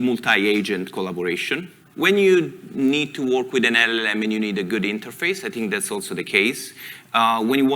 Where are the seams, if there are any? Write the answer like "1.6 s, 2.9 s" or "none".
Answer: 1.8 s